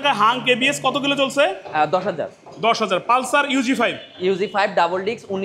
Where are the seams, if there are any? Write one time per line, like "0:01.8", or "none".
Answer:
none